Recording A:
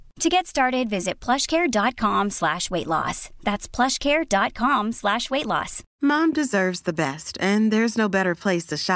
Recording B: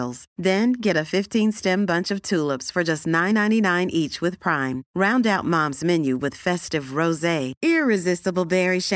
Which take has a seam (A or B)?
A